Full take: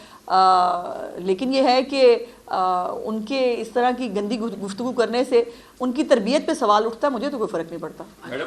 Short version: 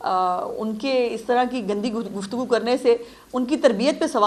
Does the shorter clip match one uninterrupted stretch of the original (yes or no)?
yes